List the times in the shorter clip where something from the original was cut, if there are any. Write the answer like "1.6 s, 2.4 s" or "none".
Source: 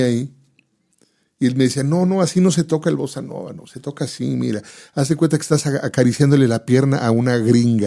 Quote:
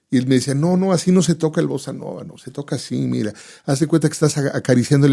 none

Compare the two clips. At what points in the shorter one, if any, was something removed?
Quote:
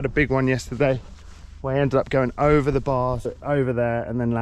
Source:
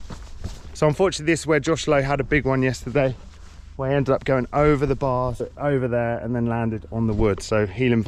none

